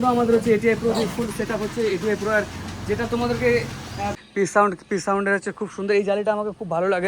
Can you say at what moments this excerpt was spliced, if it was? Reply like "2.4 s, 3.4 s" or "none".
4.2 s